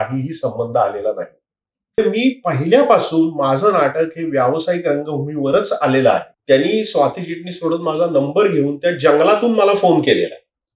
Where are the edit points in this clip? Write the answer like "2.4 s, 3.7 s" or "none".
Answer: 2.0 s, 6.3 s